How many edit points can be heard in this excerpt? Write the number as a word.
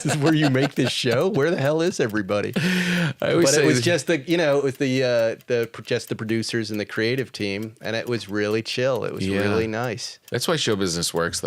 one